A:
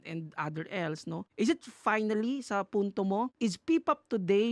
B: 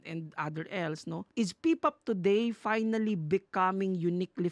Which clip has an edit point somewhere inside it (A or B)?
B